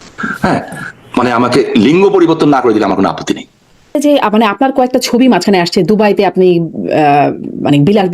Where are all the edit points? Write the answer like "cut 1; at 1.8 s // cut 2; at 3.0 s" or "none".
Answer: cut 1; at 4.0 s